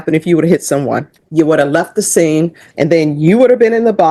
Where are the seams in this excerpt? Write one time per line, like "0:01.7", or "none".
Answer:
0:01.2
0:02.6